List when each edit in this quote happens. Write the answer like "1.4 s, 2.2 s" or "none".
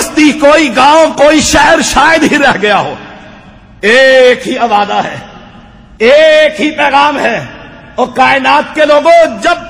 none